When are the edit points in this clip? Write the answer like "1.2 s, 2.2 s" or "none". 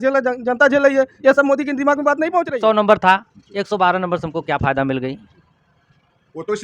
2.5 s